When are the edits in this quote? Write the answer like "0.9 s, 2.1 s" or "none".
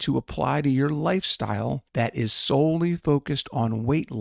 1.8 s